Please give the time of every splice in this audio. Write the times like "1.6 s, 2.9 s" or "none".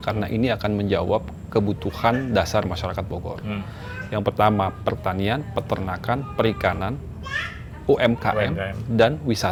none

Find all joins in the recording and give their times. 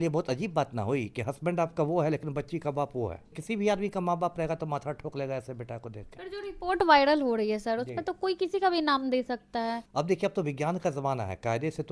3.4 s, 9.8 s

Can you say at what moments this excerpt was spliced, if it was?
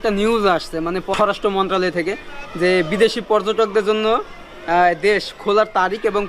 1.1 s

